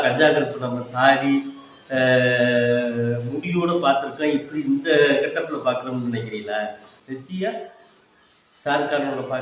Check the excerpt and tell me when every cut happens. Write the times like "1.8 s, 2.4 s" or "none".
6.9 s